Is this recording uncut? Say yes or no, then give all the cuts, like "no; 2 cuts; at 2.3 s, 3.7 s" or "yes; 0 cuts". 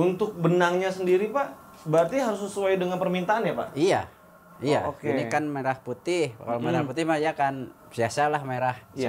yes; 0 cuts